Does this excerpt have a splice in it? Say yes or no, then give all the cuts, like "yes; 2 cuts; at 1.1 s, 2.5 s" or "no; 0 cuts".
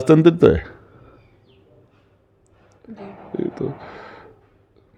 no; 0 cuts